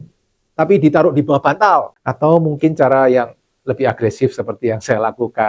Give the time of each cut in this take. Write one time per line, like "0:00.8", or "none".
0:01.9